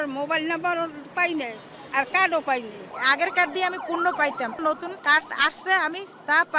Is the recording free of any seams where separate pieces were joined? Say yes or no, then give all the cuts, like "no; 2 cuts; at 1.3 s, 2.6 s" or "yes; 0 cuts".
no; 2 cuts; at 2.8 s, 4.6 s